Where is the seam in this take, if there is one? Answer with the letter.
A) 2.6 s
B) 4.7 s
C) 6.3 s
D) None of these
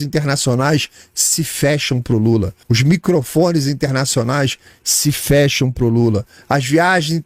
A